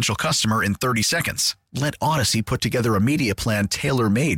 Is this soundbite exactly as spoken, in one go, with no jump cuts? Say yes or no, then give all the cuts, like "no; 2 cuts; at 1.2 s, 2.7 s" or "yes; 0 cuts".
yes; 0 cuts